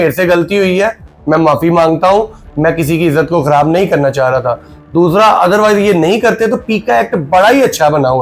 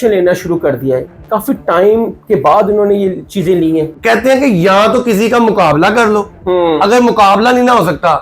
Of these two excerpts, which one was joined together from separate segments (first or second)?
second